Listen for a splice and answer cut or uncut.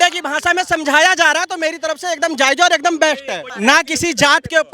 cut